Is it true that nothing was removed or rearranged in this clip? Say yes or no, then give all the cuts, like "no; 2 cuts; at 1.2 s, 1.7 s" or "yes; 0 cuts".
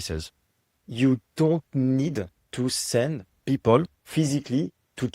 no; 3 cuts; at 2.4 s, 3.3 s, 4.0 s